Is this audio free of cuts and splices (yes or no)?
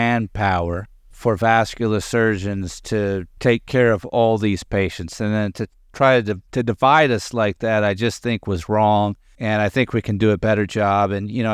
no